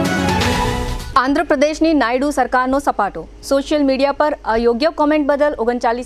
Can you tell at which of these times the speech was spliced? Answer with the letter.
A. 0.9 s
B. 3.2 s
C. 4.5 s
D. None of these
A